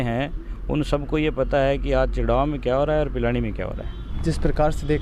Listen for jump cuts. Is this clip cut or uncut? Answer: uncut